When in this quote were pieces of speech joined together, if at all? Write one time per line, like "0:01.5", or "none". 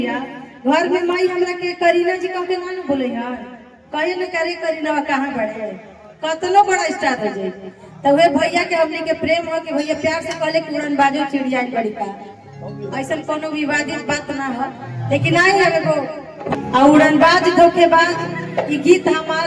0:16.6